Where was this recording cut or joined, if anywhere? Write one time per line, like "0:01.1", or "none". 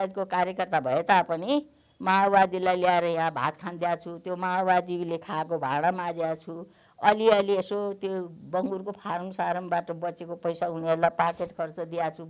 none